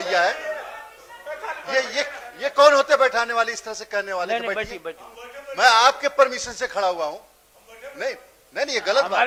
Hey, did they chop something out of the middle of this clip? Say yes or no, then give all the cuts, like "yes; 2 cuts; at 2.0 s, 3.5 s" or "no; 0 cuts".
no; 0 cuts